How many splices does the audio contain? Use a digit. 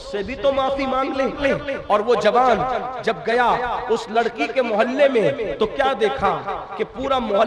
1